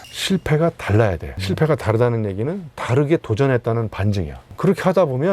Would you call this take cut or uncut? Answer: uncut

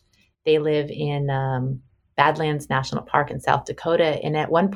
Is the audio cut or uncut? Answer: uncut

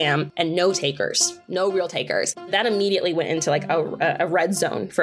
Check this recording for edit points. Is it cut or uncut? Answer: cut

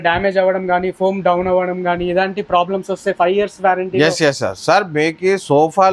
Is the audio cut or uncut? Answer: uncut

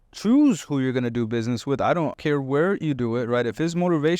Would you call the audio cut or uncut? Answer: cut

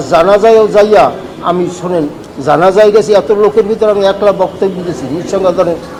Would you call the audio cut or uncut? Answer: uncut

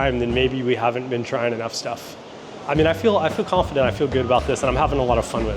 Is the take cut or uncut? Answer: cut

